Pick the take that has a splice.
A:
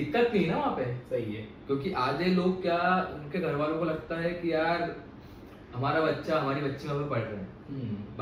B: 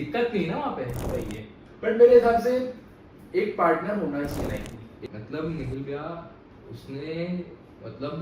B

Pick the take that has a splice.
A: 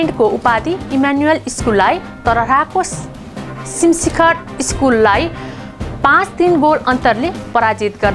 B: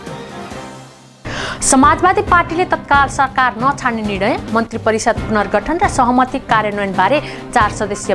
B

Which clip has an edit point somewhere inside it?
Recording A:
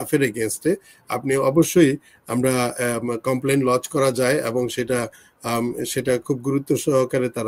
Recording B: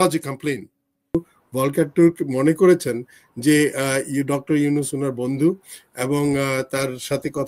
B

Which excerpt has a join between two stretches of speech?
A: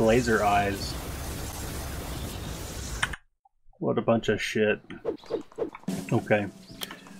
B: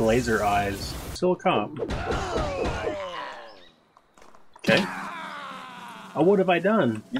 B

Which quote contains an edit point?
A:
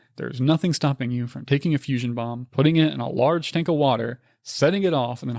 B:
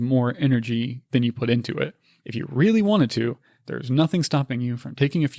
B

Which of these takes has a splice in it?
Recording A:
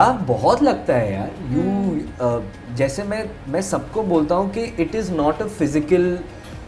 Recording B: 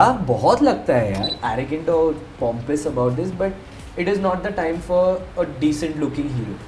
B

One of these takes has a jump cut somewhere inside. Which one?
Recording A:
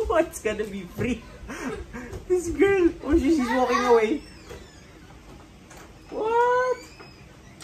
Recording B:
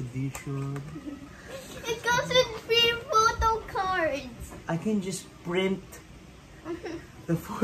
B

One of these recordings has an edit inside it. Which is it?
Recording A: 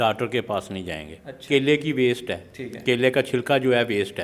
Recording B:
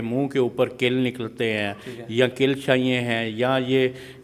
A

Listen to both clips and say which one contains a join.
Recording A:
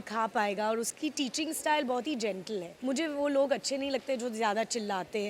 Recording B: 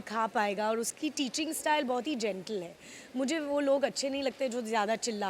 A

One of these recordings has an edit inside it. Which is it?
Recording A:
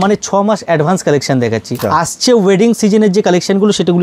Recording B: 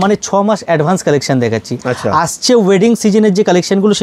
A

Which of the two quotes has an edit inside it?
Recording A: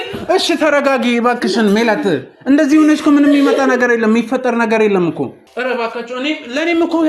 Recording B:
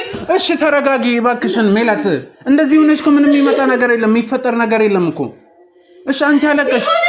A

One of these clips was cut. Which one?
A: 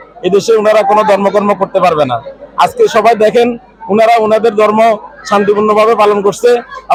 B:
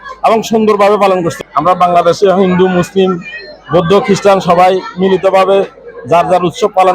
B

